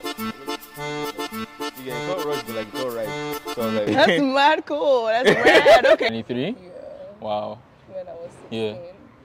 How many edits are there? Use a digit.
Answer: 1